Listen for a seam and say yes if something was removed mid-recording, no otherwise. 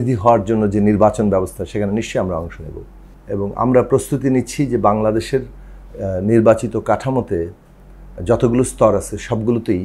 no